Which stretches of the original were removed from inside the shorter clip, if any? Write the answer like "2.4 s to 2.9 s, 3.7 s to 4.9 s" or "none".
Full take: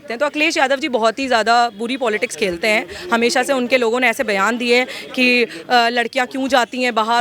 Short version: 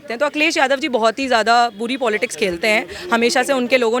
none